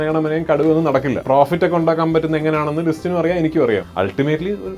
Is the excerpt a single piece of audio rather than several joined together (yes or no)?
no